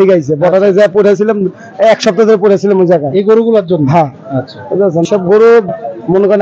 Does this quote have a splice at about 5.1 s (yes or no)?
yes